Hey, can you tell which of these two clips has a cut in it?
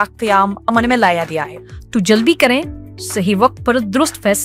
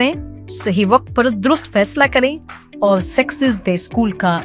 first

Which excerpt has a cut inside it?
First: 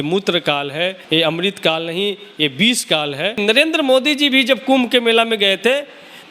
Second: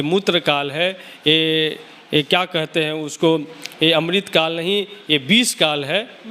first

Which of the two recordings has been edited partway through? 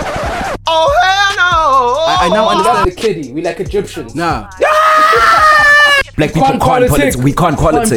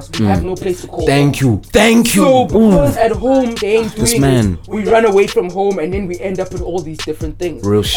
first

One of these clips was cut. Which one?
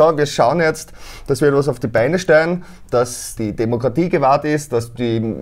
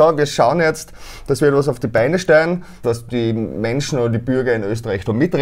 second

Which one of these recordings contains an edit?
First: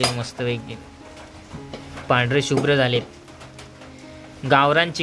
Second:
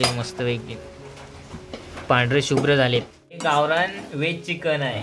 second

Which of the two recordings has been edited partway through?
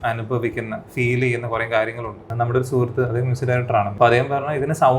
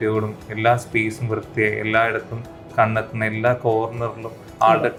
first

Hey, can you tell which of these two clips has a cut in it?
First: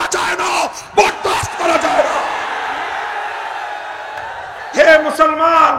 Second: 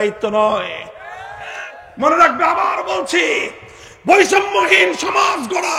first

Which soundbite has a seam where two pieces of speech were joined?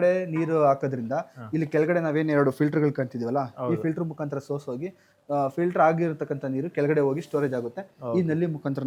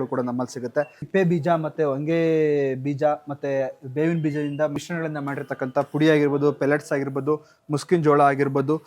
second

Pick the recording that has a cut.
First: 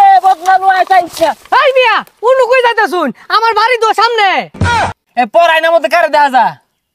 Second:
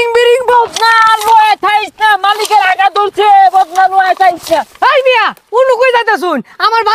first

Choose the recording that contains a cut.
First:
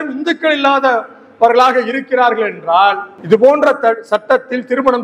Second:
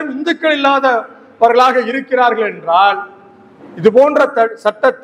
first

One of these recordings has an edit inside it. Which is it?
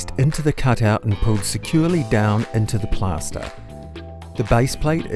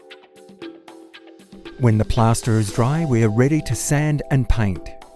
second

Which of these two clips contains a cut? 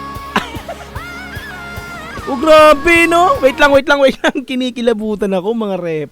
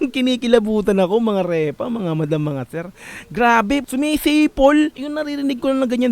second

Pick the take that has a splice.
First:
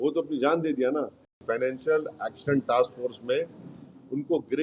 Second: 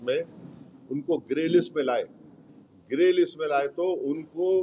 first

